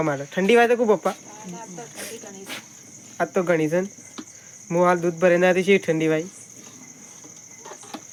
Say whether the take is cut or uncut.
uncut